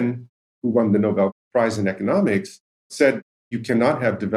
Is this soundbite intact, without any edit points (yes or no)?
no